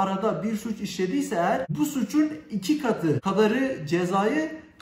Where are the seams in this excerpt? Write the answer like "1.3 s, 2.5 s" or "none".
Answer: 1.7 s, 3.2 s

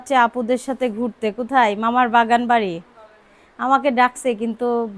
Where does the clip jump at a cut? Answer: none

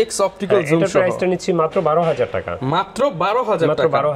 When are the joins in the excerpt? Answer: none

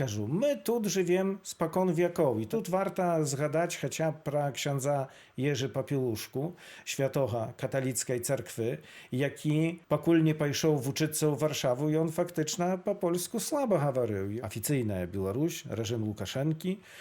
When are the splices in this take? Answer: 2.5 s, 14.3 s

